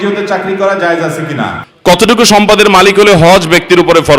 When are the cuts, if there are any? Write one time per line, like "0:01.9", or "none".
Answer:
0:01.6